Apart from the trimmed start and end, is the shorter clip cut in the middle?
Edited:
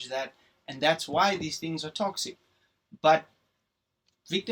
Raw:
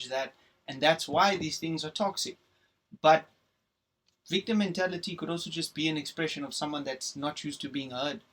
no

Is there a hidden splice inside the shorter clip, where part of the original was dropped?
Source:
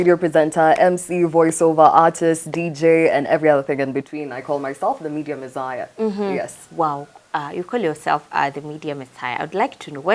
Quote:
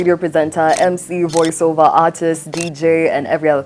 no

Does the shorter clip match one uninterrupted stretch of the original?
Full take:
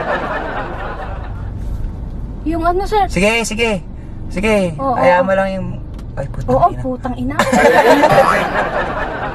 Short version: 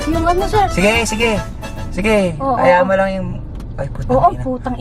yes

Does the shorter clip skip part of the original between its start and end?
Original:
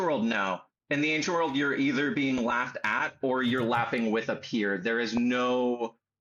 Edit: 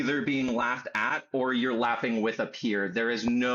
no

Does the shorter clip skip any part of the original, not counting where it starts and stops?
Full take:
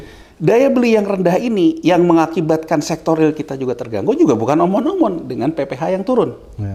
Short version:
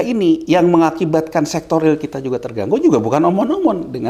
no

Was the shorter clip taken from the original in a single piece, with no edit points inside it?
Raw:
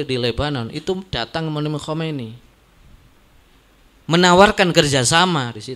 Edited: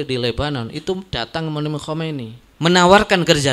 no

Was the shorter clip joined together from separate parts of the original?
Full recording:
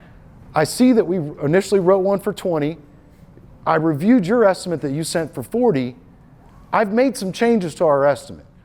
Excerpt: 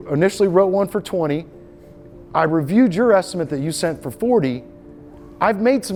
no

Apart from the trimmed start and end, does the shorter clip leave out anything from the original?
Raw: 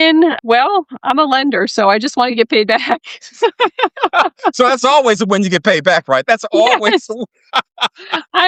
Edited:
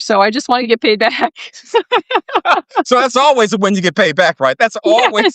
no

